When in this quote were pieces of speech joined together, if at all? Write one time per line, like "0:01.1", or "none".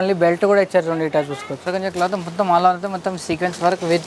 0:01.7